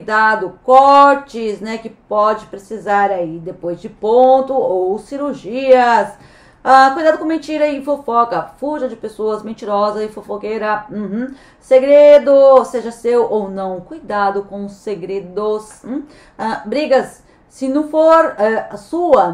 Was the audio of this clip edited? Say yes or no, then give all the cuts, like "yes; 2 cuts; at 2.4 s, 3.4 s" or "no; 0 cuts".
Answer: no; 0 cuts